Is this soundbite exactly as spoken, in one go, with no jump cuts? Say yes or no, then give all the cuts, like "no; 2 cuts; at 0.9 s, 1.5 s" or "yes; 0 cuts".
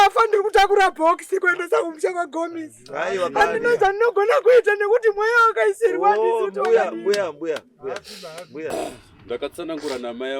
no; 1 cut; at 8.7 s